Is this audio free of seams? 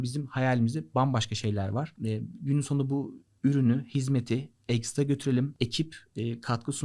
no; 2 cuts; at 1.9 s, 5.5 s

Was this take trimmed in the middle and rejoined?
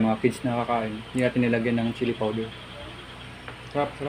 no; 0 cuts

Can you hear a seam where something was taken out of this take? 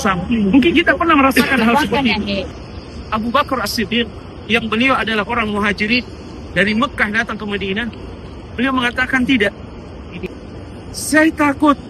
yes; 2 cuts; at 2.7 s, 10.3 s

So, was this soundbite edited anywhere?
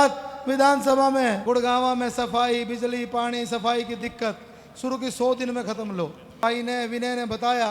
yes; 2 cuts; at 1.4 s, 6.4 s

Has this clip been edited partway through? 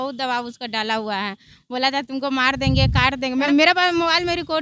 yes; 1 cut; at 3.5 s

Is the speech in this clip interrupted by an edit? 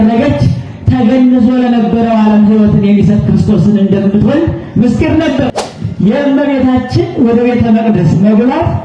yes; 1 cut; at 5.6 s

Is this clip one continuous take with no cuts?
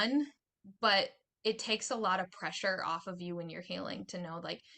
yes; 0 cuts

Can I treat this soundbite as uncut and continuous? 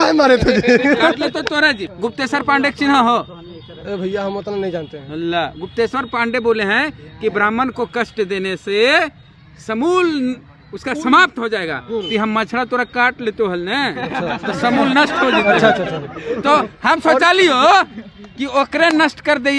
no; 1 cut; at 1.8 s

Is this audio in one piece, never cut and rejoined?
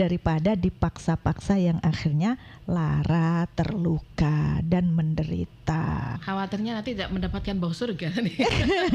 no; 1 cut; at 6.2 s

